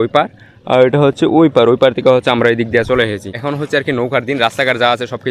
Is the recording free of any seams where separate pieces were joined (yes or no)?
yes